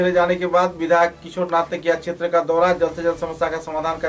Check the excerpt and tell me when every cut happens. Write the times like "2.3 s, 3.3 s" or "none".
none